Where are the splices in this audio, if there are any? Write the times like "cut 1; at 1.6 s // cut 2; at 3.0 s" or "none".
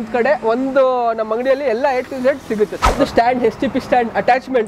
cut 1; at 3.0 s